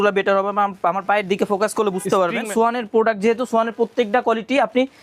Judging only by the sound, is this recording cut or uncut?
cut